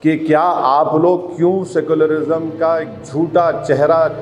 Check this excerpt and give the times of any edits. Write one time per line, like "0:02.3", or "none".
none